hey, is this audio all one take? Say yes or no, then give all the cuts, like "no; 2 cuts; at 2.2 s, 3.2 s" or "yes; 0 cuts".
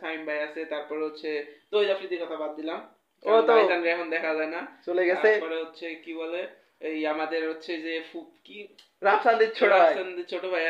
yes; 0 cuts